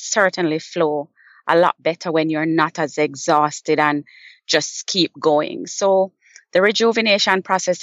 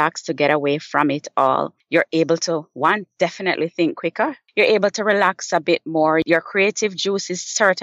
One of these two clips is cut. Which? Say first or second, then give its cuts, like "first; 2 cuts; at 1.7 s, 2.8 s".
second; 3 cuts; at 1.8 s, 4.4 s, 6.2 s